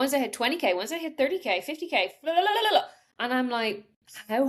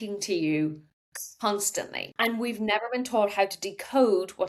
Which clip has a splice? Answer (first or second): second